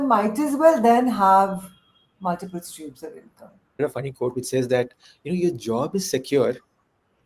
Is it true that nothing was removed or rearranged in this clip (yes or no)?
no